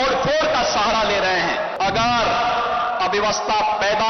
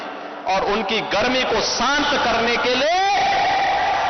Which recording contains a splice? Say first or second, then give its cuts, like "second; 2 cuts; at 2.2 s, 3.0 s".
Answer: first; 1 cut; at 1.7 s